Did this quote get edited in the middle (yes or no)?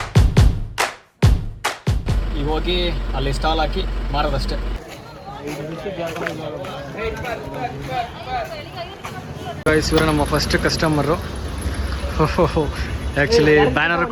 no